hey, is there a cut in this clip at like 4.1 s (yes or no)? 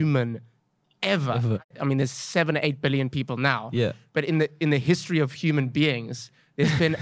no